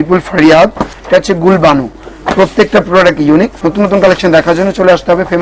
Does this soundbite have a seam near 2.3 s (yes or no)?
no